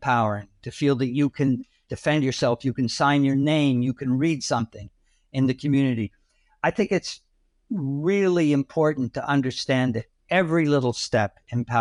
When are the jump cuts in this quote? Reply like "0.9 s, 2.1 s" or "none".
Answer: none